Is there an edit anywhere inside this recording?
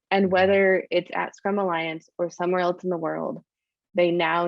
no; 0 cuts

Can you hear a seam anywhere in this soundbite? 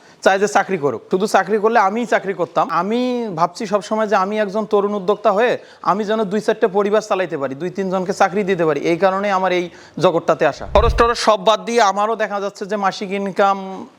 yes; 3 cuts; at 1.0 s, 2.7 s, 10.6 s

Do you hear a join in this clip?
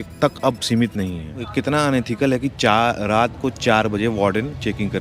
yes; 1 cut; at 1.4 s

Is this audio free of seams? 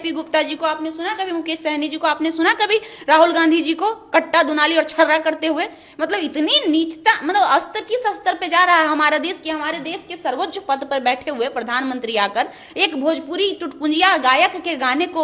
yes; 0 cuts

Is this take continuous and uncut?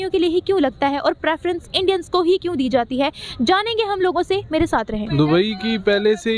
yes; 0 cuts

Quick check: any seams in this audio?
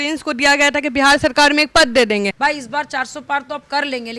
yes; 1 cut; at 2.3 s

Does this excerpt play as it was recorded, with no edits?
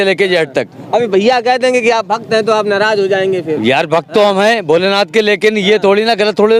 yes; 0 cuts

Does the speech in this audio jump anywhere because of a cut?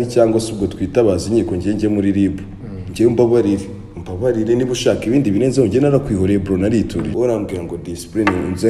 yes; 1 cut; at 7.1 s

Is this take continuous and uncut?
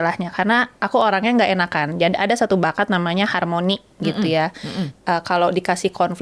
yes; 0 cuts

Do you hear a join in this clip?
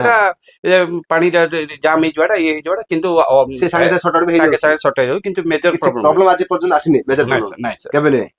no; 0 cuts

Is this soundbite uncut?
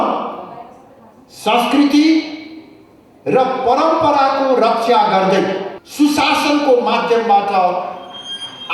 no; 1 cut; at 5.8 s

